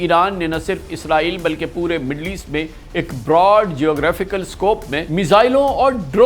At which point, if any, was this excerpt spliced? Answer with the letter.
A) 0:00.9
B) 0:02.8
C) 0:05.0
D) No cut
C